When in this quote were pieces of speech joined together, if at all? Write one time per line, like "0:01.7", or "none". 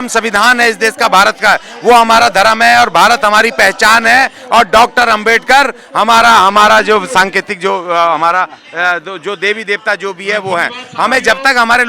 none